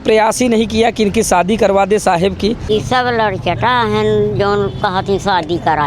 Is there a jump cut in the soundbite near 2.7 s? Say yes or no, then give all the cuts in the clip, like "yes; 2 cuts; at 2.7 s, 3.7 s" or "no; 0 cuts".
yes; 1 cut; at 2.7 s